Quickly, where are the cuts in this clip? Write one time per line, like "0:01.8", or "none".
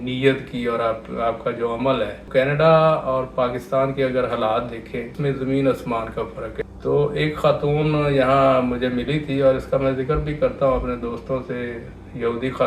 0:02.3
0:05.1
0:06.6